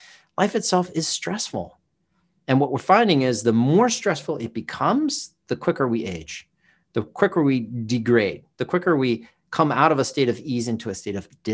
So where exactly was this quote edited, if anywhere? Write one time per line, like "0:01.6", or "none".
none

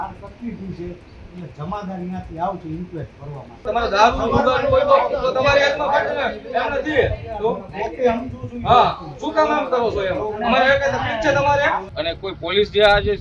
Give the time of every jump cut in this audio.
0:03.6
0:11.9

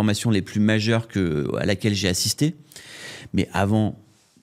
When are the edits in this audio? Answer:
none

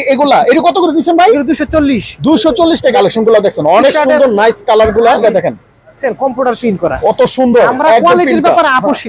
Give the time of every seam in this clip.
0:02.9
0:05.2

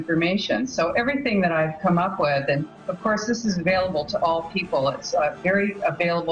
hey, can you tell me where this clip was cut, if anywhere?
none

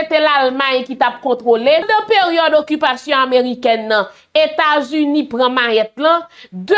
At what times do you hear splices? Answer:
0:01.9

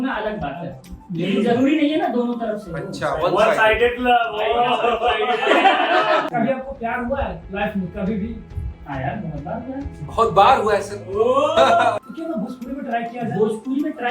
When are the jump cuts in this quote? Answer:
0:06.3
0:12.0

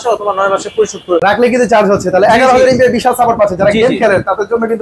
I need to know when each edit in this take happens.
0:01.2

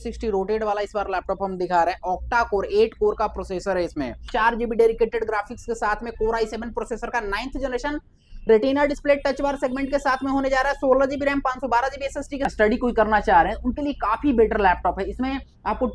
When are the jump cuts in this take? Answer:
0:04.2
0:12.4

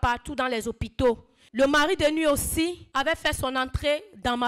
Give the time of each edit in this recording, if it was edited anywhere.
0:01.4
0:02.8

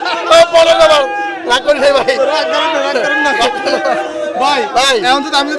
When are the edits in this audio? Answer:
none

